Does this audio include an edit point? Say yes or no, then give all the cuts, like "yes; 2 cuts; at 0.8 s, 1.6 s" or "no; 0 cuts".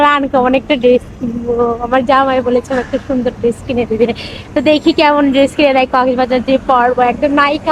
no; 0 cuts